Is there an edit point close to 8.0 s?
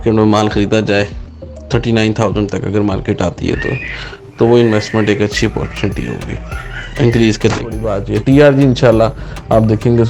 yes; 1 cut; at 8.0 s

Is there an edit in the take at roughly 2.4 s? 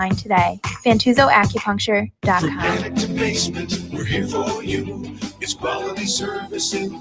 yes; 1 cut; at 2.4 s

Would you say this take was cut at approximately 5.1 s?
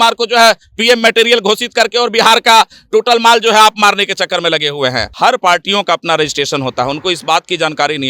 yes; 1 cut; at 5.1 s

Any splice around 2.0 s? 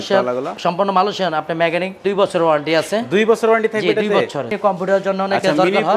yes; 2 cuts; at 2.0 s, 4.5 s

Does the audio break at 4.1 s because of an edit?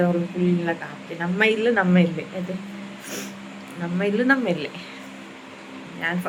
no; 0 cuts

